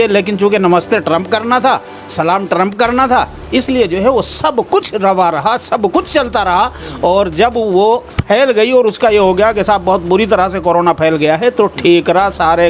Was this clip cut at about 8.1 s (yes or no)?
yes